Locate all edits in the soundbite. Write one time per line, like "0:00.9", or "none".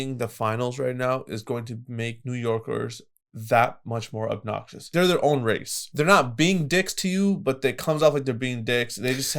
0:04.9
0:05.8